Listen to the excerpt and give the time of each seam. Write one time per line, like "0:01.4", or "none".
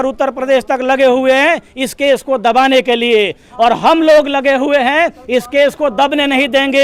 none